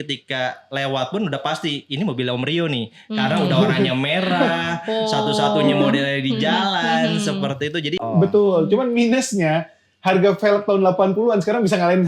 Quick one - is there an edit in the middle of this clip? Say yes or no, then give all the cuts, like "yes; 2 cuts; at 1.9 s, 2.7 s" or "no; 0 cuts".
yes; 1 cut; at 8.0 s